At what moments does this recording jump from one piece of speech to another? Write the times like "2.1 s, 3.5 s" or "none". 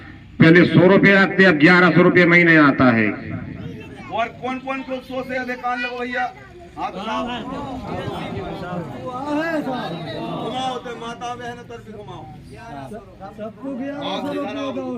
none